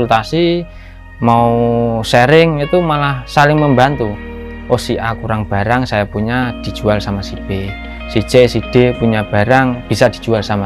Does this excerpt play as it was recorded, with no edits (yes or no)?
yes